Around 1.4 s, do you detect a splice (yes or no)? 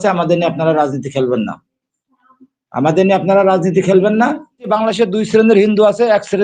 no